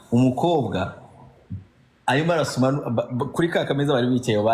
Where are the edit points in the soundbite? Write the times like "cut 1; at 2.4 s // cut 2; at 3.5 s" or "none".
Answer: none